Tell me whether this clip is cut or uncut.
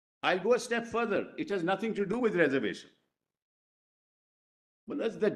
uncut